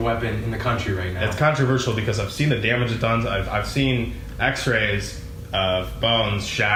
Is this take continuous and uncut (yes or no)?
yes